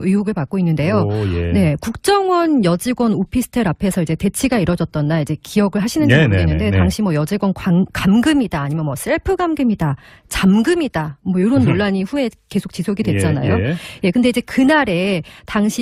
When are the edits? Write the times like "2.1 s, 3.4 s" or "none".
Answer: 3.4 s